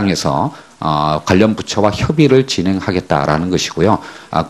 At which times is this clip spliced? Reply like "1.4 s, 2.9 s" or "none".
1.6 s